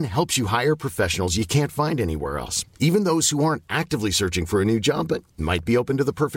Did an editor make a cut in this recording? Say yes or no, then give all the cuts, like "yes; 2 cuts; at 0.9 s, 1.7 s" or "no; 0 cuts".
no; 0 cuts